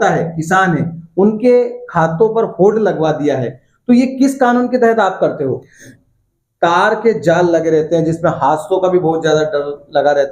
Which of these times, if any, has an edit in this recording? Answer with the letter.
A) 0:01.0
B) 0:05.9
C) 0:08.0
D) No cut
B